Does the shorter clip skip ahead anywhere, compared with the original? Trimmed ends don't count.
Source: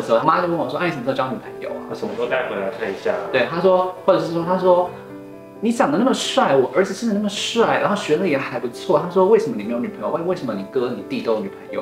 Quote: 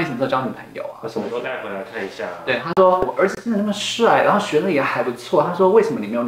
yes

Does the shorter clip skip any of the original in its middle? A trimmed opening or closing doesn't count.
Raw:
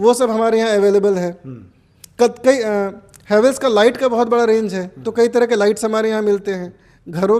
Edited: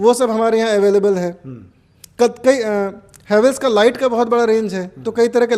no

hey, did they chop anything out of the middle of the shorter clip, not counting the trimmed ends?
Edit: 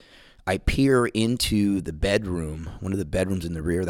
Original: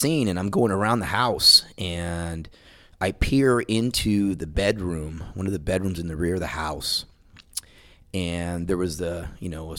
no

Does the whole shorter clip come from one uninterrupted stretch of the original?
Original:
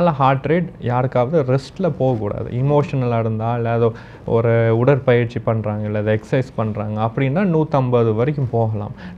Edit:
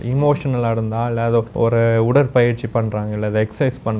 no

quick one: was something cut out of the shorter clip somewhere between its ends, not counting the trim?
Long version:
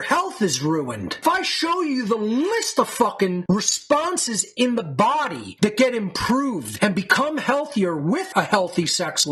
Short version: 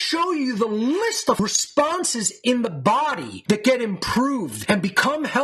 yes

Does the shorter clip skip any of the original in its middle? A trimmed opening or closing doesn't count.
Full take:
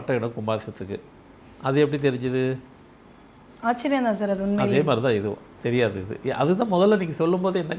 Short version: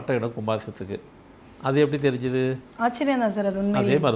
yes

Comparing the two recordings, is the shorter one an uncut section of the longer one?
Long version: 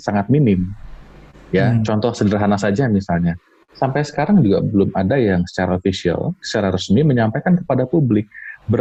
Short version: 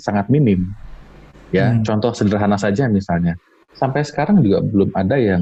yes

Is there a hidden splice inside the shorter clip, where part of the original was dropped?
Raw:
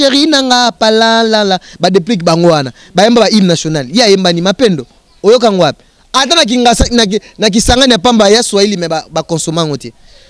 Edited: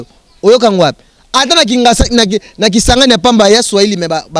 no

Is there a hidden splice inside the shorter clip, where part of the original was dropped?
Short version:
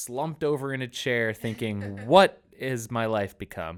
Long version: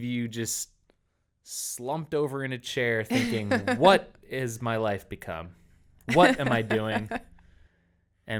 no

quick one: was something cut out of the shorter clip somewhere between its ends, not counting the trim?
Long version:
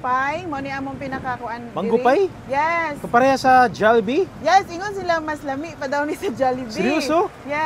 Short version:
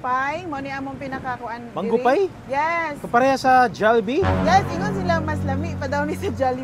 no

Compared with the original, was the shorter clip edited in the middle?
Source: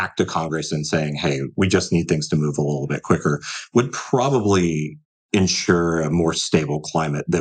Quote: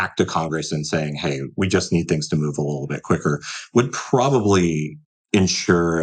no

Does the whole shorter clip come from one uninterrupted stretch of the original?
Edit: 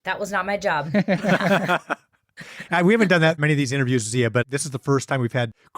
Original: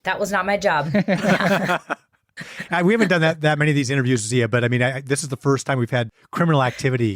no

